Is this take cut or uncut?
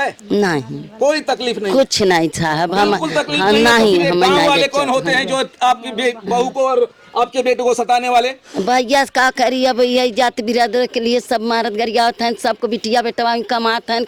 uncut